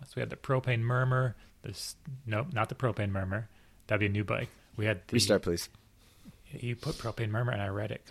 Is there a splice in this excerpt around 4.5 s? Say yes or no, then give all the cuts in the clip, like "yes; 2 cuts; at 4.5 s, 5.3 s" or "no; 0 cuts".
yes; 1 cut; at 4.5 s